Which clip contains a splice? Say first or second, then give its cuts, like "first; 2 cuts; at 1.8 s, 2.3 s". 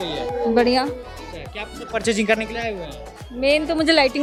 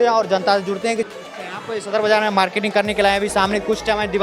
second; 1 cut; at 1.1 s